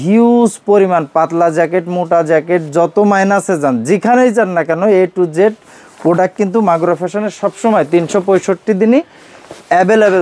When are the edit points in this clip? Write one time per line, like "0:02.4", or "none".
none